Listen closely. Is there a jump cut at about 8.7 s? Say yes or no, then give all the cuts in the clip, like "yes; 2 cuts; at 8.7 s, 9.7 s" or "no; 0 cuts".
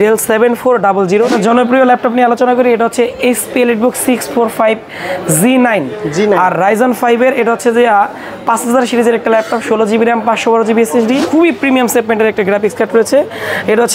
no; 2 cuts; at 1.4 s, 11.2 s